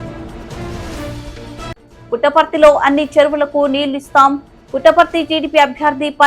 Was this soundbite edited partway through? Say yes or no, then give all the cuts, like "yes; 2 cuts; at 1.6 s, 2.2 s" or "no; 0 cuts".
yes; 1 cut; at 1.8 s